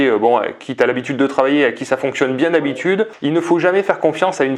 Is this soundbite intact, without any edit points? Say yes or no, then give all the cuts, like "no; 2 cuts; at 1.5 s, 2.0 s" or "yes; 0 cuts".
yes; 0 cuts